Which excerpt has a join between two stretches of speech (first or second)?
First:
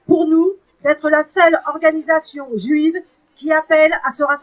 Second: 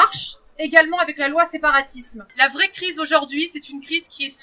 second